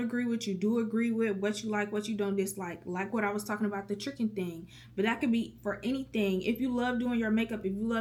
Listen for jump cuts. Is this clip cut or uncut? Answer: uncut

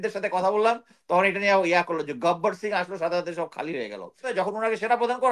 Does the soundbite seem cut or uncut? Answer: cut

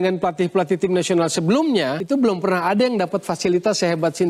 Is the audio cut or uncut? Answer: uncut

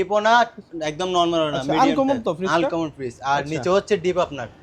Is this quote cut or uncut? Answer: uncut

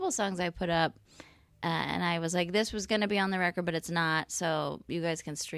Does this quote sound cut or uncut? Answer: uncut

